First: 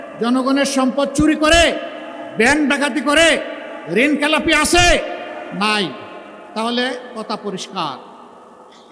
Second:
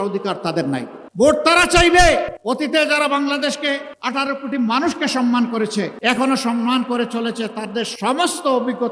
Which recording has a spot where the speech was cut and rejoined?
second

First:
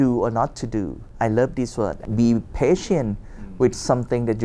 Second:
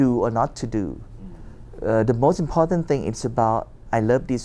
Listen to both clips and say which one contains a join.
first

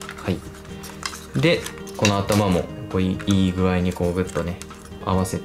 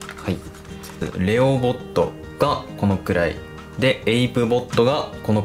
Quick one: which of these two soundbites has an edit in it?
second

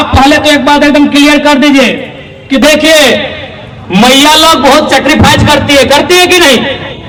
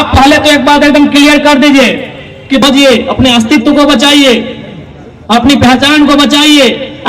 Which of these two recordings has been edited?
second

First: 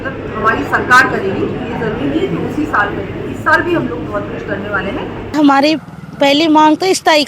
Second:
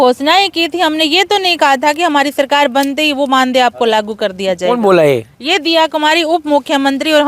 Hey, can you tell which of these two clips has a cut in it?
first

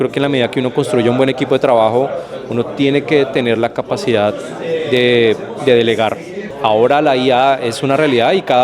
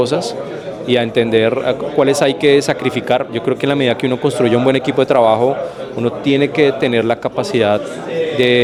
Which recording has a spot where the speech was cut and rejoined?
first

